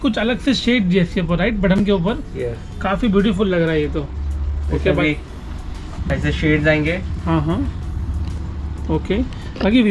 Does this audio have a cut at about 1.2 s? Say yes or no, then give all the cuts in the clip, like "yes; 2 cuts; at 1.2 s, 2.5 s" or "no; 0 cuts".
no; 0 cuts